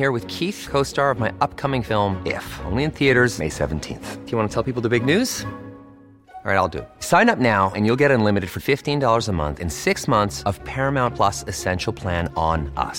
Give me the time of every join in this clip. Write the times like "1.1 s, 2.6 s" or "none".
none